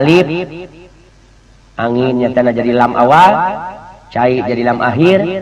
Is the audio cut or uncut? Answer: uncut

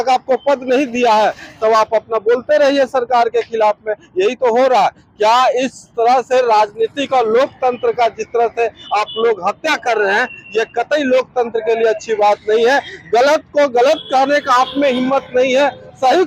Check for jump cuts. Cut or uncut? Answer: uncut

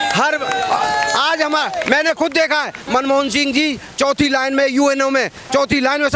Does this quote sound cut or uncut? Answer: uncut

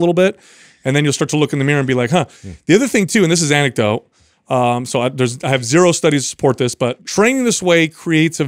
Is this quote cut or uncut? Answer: cut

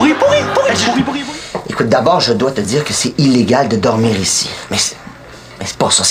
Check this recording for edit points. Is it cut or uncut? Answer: cut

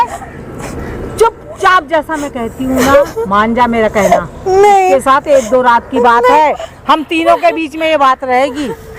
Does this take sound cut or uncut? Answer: uncut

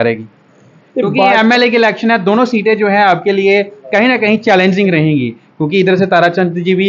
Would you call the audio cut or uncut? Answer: uncut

